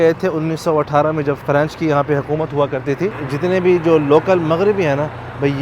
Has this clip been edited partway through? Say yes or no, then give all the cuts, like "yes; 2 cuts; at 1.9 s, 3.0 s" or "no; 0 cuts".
yes; 2 cuts; at 1.4 s, 3.2 s